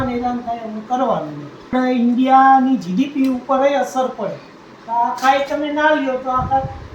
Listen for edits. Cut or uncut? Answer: cut